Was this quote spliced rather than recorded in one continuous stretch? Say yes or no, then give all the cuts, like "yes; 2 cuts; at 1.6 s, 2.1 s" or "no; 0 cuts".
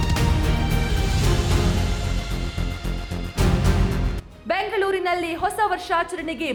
no; 0 cuts